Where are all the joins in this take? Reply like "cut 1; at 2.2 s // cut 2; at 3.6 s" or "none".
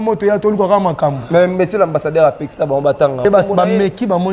cut 1; at 3.2 s